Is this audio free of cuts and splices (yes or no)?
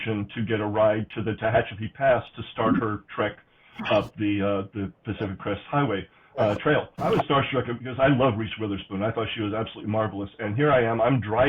no